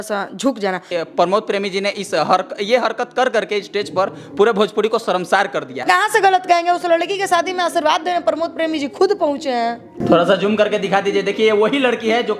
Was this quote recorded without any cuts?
no; 3 cuts; at 0.9 s, 5.8 s, 10.0 s

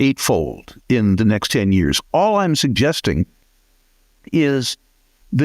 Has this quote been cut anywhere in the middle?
no; 0 cuts

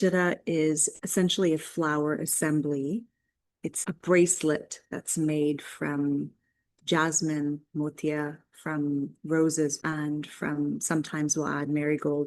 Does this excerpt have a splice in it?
yes; 3 cuts; at 0.9 s, 3.8 s, 9.8 s

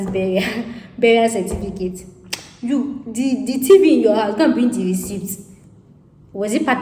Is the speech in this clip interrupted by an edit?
no; 0 cuts

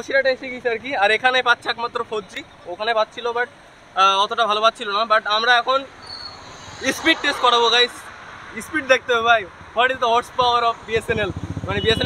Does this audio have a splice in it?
no; 0 cuts

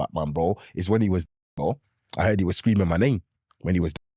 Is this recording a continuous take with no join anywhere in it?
yes; 0 cuts

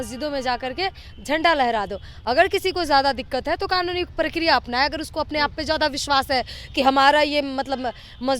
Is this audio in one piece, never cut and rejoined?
yes; 0 cuts

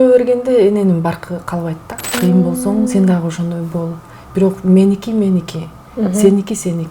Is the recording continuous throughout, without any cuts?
no; 1 cut; at 2.1 s

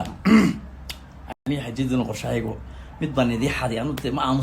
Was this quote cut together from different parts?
no; 0 cuts

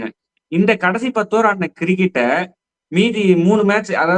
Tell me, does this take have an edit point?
no; 0 cuts

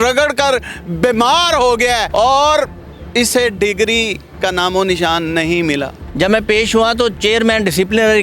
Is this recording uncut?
no; 2 cuts; at 2.1 s, 6.0 s

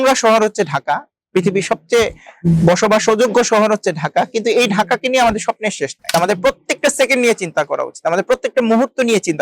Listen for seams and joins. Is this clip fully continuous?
no; 1 cut; at 6.0 s

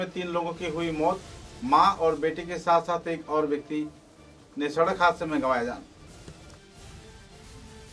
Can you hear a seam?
no; 0 cuts

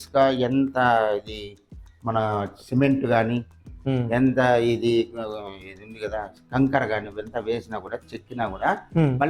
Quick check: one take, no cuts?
yes; 0 cuts

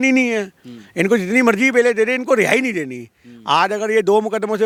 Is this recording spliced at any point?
no; 0 cuts

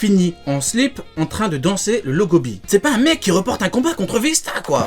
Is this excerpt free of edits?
no; 1 cut; at 2.6 s

